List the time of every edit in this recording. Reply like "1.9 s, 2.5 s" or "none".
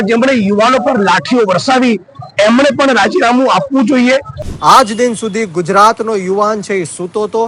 4.4 s